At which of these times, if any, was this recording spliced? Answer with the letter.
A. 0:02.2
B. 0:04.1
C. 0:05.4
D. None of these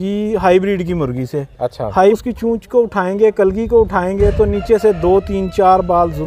A